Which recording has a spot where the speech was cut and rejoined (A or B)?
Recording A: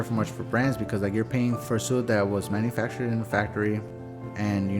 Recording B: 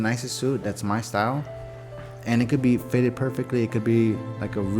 A